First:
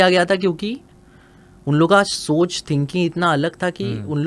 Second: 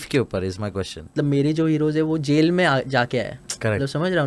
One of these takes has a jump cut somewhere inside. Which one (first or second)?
second